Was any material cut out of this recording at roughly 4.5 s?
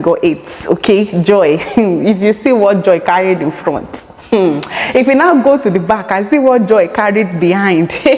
no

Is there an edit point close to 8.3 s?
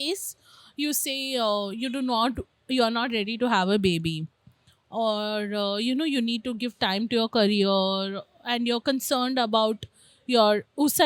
no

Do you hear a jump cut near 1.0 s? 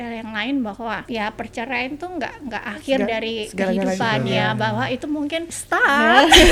yes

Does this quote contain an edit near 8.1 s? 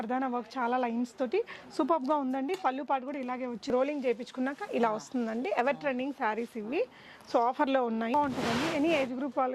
yes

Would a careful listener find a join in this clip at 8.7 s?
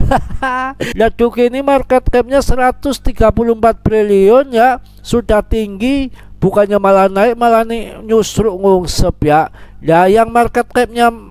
no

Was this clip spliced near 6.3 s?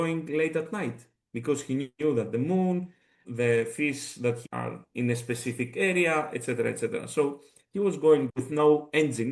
no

